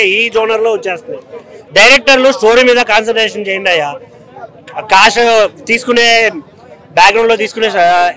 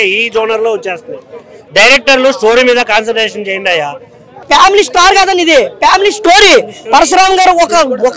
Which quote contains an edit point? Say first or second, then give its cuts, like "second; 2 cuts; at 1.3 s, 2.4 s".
second; 1 cut; at 4.3 s